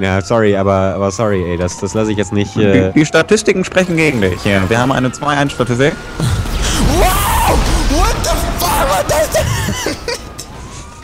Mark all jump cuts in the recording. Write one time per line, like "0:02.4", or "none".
none